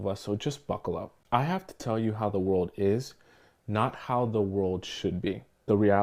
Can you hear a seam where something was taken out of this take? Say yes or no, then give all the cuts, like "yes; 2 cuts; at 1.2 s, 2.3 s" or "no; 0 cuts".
no; 0 cuts